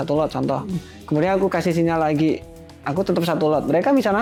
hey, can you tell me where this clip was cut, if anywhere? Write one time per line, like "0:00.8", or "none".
none